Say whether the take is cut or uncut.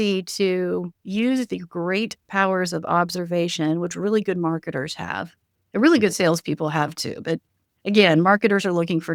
uncut